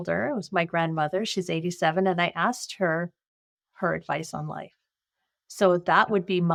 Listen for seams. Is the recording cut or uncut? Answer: uncut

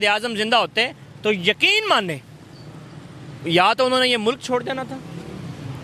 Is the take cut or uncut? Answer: uncut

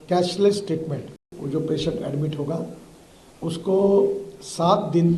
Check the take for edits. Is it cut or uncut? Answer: cut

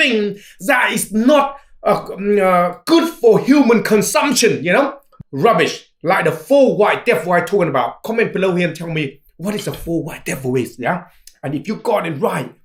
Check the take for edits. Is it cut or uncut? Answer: cut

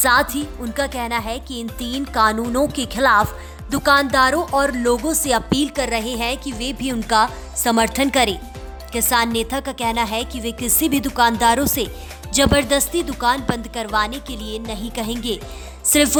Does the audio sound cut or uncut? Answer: uncut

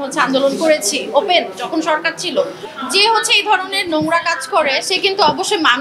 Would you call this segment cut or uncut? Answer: cut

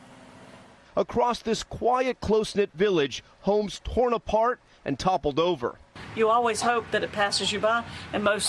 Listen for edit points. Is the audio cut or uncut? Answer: cut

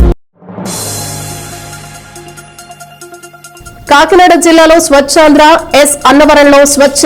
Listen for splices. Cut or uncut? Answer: uncut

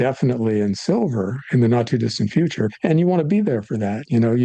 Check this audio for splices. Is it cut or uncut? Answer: cut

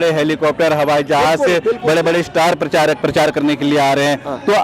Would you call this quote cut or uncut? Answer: cut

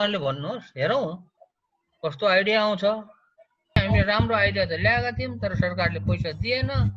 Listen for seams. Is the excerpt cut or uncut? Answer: cut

